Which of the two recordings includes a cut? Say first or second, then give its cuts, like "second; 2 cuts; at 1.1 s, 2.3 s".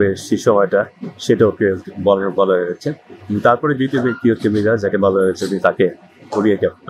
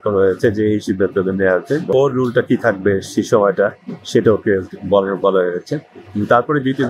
second; 1 cut; at 1.9 s